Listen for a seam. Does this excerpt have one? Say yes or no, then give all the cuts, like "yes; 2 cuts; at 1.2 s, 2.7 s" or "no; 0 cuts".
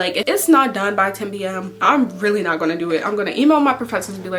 no; 0 cuts